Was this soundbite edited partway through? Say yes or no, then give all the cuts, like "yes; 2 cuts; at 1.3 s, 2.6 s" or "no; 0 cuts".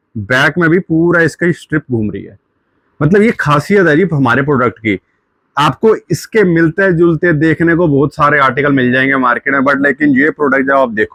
no; 0 cuts